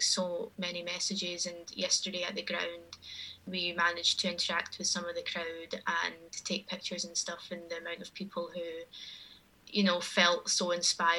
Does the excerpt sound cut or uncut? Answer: cut